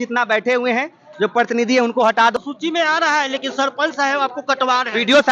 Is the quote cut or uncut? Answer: cut